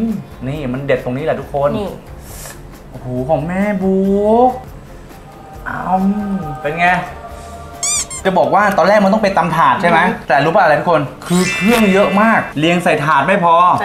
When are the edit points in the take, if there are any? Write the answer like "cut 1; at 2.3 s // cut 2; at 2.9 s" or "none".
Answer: cut 1; at 4.7 s // cut 2; at 8.2 s // cut 3; at 12.5 s